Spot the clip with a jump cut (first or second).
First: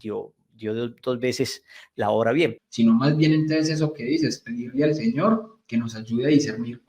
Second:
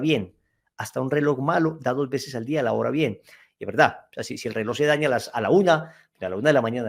first